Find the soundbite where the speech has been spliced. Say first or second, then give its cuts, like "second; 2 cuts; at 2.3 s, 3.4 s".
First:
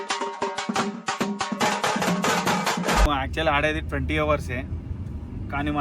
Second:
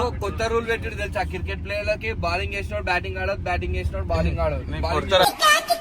first; 1 cut; at 3.1 s